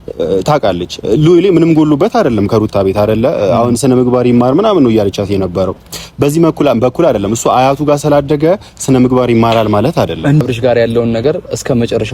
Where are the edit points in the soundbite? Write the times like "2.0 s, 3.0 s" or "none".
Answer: 10.4 s